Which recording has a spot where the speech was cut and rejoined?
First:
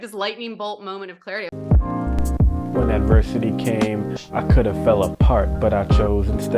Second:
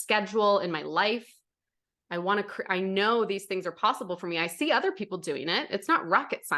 first; 1 cut; at 1.5 s

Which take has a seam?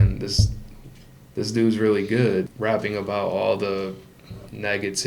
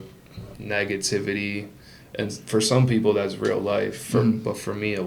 first; 1 cut; at 2.5 s

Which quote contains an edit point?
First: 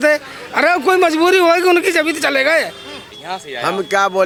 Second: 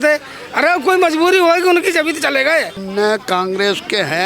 second; 1 cut; at 2.8 s

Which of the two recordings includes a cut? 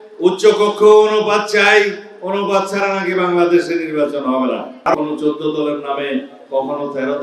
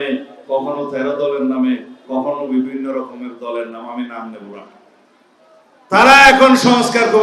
first; 1 cut; at 5.0 s

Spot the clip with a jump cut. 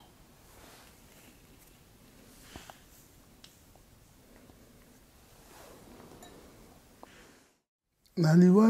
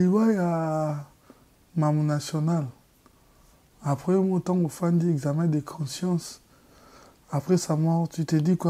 first; 1 cut; at 7.4 s

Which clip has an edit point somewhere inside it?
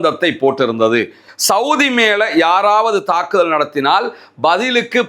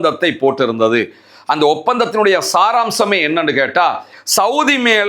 first; 1 cut; at 1.2 s

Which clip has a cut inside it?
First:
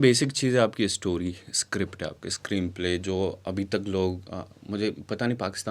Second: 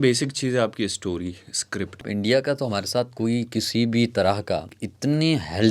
second; 2 cuts; at 2.1 s, 4.8 s

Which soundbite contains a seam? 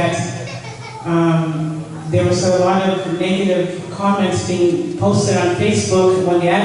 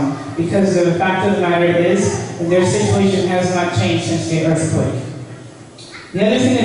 first; 1 cut; at 3.6 s

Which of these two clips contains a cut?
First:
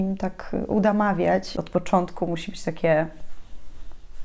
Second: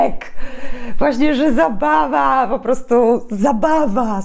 first; 1 cut; at 1.5 s

